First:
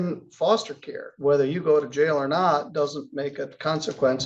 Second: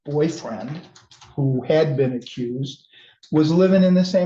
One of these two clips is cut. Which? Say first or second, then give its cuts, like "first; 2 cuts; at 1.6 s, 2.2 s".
first; 1 cut; at 1.1 s